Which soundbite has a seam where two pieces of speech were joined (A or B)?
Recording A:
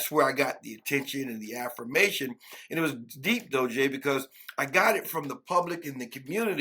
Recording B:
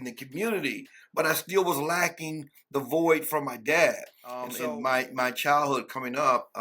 B